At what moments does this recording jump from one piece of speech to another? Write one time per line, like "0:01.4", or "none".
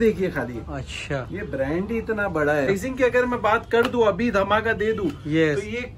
0:02.7